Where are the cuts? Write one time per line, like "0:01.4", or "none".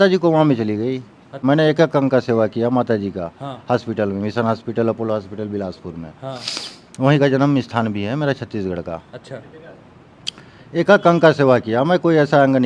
0:01.4